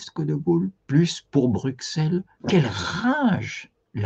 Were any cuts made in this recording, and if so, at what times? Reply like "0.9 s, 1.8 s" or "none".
2.3 s